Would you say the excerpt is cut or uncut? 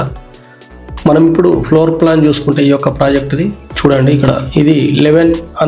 uncut